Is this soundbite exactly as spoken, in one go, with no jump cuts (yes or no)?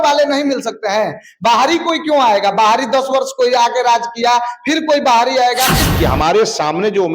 no